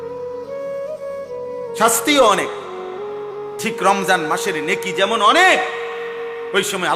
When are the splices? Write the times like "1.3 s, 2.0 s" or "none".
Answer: 1.4 s